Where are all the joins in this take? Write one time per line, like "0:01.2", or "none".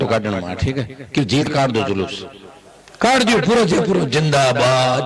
0:01.5